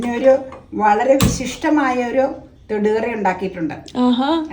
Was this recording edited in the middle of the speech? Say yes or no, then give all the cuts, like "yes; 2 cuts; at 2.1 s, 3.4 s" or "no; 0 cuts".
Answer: no; 0 cuts